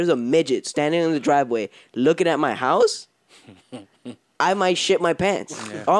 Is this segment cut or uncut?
uncut